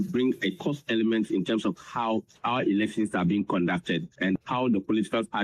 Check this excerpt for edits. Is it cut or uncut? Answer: cut